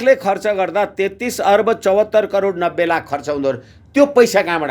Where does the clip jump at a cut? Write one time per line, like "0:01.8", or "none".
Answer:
none